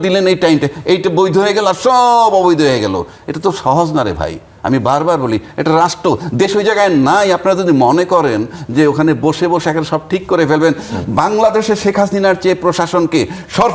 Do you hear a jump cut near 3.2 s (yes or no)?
no